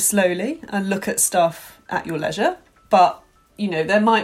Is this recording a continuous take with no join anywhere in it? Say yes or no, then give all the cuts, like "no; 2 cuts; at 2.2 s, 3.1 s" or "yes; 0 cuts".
yes; 0 cuts